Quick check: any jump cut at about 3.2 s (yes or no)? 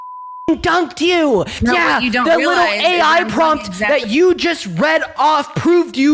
no